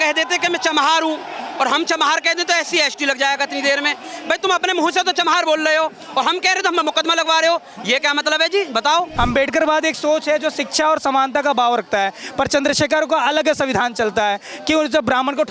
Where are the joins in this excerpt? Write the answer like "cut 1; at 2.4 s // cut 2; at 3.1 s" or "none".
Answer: cut 1; at 9.1 s